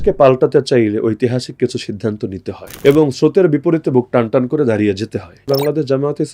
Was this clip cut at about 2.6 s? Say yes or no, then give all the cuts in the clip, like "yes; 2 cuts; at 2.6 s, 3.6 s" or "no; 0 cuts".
yes; 2 cuts; at 2.6 s, 5.5 s